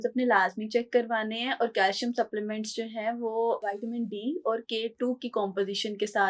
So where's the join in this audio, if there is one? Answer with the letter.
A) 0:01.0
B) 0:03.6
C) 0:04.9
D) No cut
B